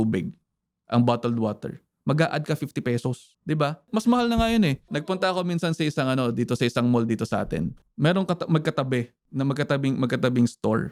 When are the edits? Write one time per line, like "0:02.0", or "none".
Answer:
none